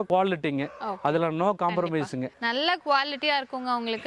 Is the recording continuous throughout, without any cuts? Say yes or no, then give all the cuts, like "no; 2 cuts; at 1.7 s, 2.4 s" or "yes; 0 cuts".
yes; 0 cuts